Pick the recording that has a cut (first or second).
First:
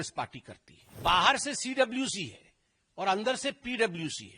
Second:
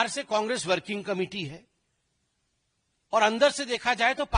first